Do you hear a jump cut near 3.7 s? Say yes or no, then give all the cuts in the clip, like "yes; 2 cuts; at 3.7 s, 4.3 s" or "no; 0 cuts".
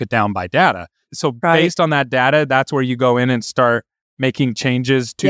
no; 1 cut; at 1.0 s